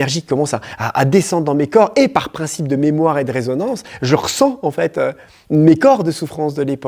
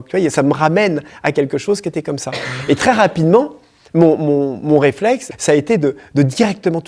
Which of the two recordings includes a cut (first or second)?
second